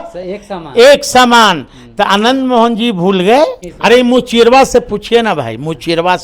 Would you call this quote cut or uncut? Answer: cut